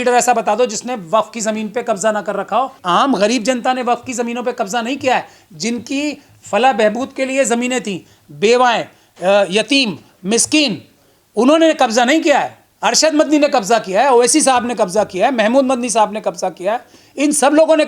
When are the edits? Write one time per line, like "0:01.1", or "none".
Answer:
0:02.8